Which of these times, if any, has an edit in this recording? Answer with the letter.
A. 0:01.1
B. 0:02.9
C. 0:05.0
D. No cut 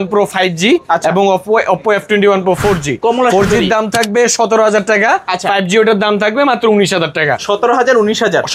D